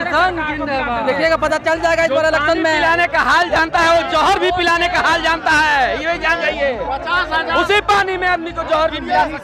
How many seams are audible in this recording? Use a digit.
0